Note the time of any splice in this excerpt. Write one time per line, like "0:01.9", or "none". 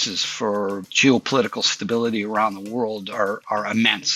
none